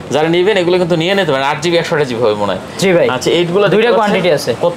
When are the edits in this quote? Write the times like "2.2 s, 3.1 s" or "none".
none